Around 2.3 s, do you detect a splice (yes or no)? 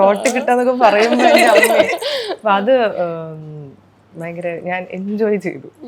no